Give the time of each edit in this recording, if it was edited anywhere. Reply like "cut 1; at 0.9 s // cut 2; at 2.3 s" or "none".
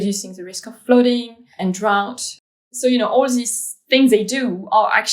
cut 1; at 1.4 s // cut 2; at 2.4 s